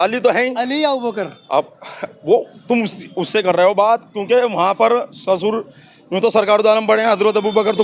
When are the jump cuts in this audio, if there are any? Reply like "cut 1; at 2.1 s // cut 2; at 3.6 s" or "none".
none